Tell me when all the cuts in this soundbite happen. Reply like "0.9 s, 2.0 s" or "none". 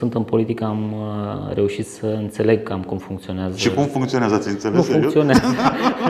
none